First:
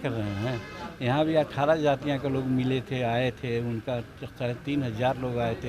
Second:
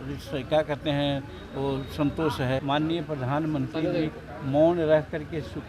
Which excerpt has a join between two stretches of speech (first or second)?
second